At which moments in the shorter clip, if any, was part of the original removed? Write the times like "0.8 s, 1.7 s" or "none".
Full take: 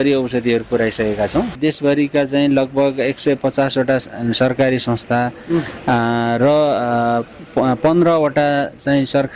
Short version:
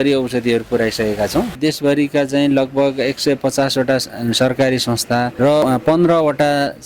5.4 s